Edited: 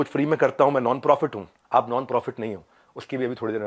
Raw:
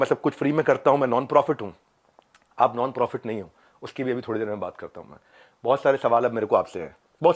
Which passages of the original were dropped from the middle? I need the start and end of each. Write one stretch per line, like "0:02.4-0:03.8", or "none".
0:01.8-0:02.4